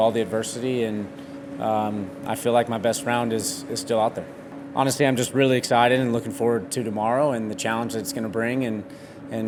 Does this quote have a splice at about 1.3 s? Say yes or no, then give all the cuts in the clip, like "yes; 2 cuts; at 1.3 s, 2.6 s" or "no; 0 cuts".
no; 0 cuts